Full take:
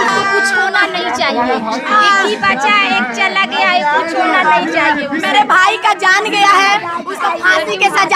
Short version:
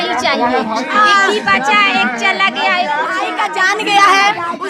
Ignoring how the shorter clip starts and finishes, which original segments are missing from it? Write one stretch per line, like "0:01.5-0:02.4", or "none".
0:04.2-0:05.7